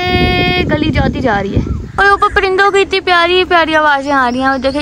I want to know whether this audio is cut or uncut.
cut